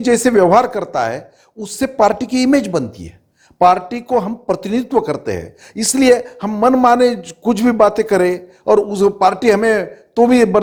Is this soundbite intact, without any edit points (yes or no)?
yes